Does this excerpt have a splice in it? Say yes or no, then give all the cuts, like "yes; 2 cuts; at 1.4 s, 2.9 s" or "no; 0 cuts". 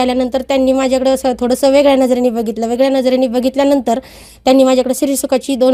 no; 0 cuts